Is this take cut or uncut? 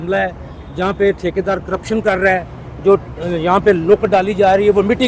uncut